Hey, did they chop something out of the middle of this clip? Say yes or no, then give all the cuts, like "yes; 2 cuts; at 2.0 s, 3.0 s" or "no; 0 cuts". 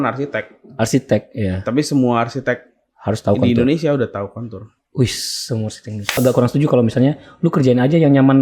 yes; 1 cut; at 6.1 s